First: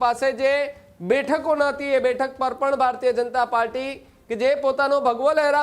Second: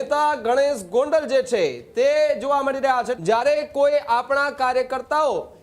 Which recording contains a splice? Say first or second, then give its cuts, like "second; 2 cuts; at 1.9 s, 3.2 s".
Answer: second; 1 cut; at 3.1 s